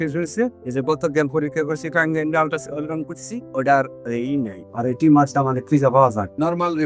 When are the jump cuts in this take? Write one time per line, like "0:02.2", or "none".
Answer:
none